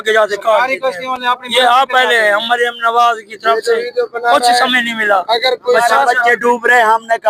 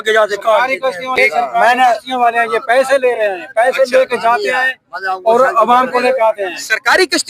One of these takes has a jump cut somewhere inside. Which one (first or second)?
second